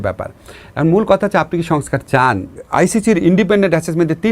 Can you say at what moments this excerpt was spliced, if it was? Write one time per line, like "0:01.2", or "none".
0:02.6